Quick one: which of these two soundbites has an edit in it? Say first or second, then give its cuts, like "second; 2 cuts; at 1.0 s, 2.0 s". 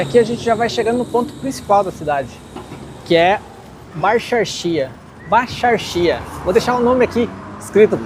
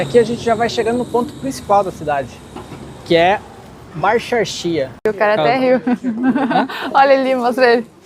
second; 1 cut; at 5.1 s